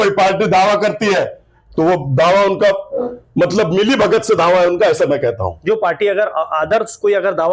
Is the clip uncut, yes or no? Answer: yes